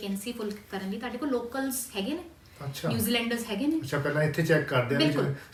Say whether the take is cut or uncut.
uncut